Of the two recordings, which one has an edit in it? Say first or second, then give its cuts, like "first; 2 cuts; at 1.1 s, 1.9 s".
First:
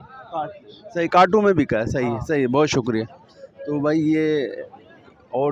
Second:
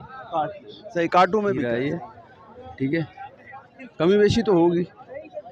second; 1 cut; at 1.6 s